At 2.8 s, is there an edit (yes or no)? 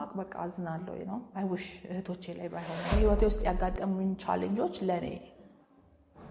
yes